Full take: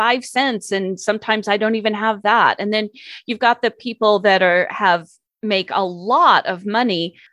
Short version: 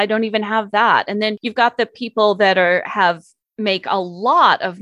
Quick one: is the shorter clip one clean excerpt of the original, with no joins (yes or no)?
no